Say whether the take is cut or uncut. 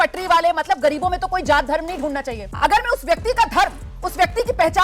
cut